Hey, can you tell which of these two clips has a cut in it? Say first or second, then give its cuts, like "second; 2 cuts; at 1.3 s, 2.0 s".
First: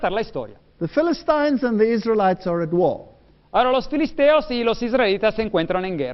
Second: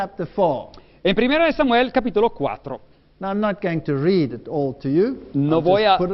second; 1 cut; at 3.8 s